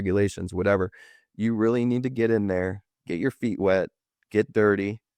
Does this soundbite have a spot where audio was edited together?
no; 0 cuts

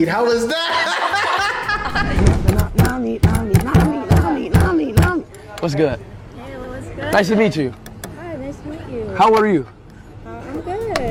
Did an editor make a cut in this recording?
no; 0 cuts

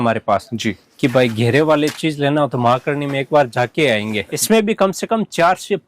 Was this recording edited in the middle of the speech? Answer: yes; 1 cut; at 4.4 s

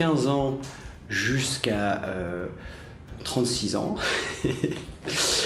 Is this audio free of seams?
no; 1 cut; at 3.0 s

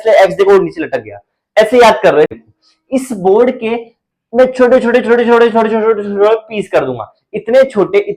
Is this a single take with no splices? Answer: no; 1 cut; at 2.4 s

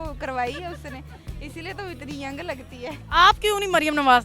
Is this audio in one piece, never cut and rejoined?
no; 1 cut; at 3.0 s

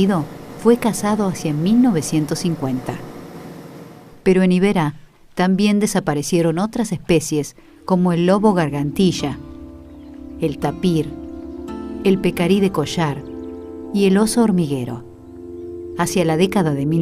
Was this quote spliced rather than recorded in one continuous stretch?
yes; 1 cut; at 10.8 s

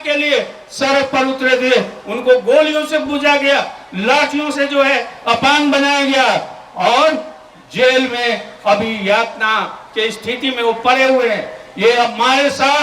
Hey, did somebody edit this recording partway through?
no; 0 cuts

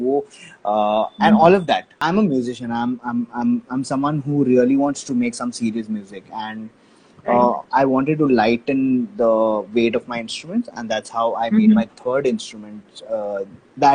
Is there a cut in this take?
yes; 1 cut; at 2.0 s

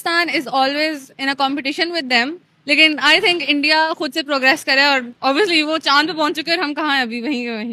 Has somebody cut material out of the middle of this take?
no; 0 cuts

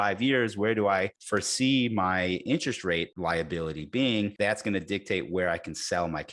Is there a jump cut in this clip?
yes; 3 cuts; at 1.2 s, 3.1 s, 4.3 s

